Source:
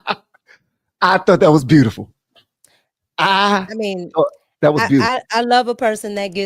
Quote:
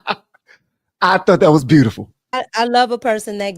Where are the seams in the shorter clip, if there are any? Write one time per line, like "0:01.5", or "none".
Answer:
0:02.3